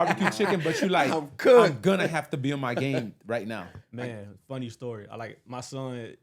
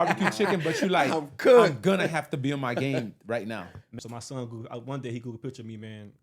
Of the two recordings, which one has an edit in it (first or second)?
second